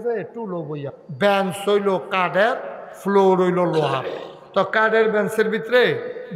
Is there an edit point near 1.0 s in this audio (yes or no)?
yes